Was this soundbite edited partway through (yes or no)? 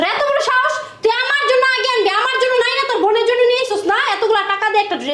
no